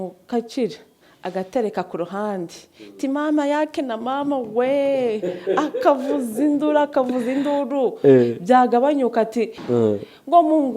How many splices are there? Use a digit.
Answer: 1